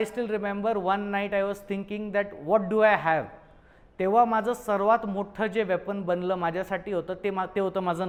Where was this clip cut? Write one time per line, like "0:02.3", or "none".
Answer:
none